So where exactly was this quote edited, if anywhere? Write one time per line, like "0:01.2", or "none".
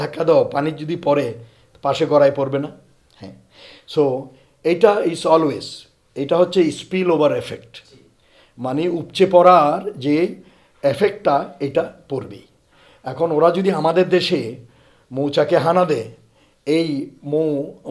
none